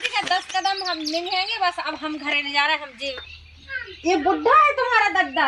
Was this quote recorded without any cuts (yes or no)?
no